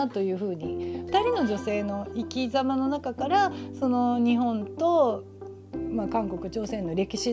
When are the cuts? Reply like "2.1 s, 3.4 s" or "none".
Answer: 1.0 s